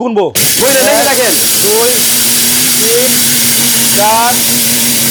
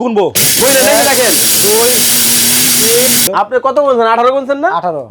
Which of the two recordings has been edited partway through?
second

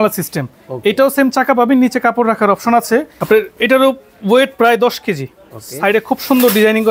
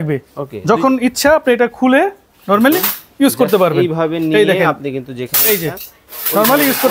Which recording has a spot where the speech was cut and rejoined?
first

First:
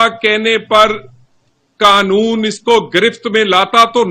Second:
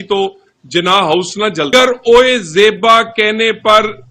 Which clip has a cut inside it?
second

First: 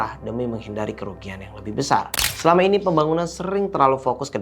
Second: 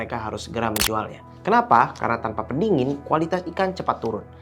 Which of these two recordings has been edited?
first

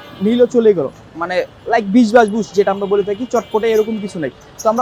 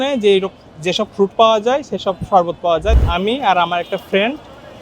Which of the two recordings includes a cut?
second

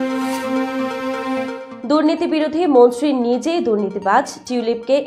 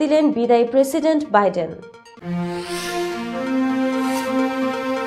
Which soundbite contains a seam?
first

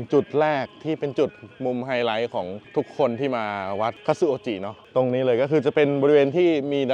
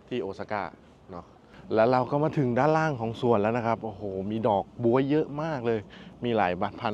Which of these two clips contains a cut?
second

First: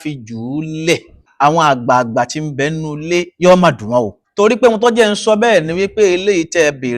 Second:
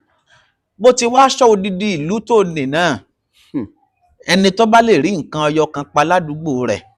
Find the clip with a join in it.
first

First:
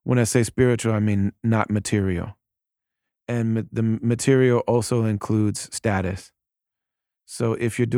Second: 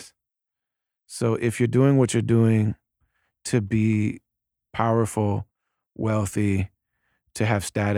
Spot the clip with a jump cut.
second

